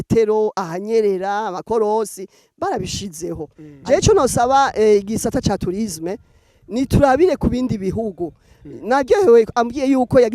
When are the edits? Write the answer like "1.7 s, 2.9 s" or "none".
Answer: 3.7 s